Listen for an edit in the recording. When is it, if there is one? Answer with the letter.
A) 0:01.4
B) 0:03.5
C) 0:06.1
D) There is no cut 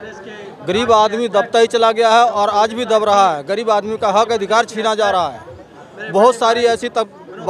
D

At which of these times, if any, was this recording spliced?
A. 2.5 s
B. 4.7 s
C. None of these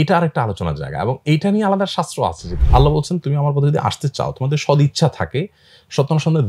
A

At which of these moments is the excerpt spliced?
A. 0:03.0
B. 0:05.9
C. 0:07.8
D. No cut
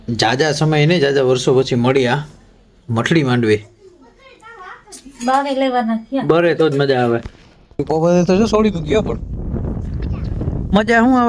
C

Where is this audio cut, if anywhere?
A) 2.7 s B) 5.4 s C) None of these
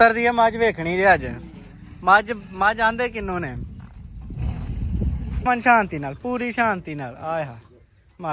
B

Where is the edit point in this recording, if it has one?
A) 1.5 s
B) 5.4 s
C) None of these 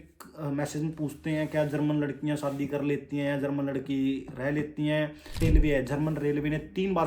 B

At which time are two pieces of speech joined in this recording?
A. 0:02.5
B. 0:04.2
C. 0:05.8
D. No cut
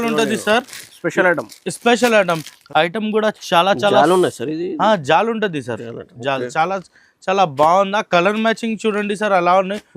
A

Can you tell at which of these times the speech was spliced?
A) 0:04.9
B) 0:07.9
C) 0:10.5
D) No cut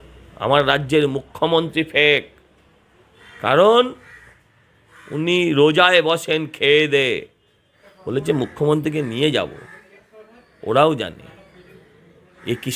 B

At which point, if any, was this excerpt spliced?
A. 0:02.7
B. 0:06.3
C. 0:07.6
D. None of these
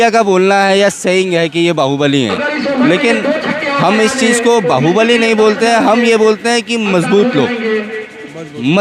D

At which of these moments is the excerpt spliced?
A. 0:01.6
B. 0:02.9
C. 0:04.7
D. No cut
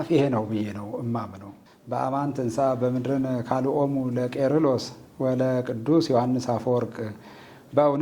A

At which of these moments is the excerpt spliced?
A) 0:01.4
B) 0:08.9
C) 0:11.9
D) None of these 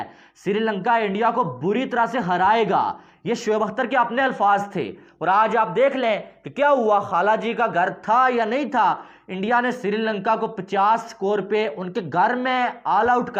D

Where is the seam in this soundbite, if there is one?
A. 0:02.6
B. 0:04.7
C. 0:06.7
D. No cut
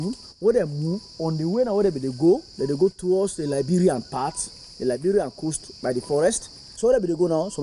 C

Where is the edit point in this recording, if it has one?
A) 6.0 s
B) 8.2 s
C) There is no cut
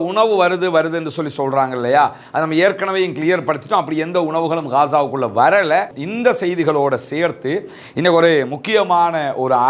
A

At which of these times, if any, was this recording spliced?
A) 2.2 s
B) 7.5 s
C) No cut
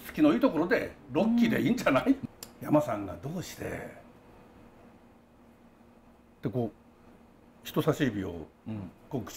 A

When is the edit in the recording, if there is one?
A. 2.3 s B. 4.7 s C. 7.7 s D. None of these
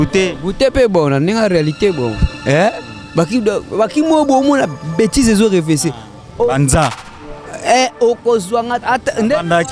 A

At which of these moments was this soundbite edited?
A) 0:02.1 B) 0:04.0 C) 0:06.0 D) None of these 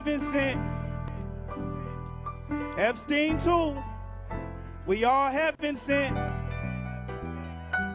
D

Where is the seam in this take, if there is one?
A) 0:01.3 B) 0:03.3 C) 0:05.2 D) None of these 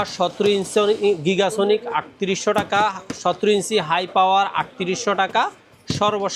D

